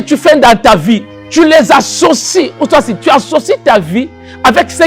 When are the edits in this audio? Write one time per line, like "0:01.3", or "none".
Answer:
0:01.2